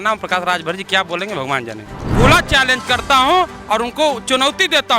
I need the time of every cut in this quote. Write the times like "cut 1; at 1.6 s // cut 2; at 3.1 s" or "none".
cut 1; at 2.0 s